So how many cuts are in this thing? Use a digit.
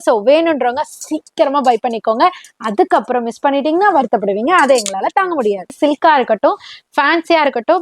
1